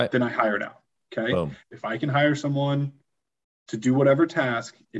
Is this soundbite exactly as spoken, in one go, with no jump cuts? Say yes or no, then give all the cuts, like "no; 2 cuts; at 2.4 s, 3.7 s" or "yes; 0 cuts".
no; 1 cut; at 1.7 s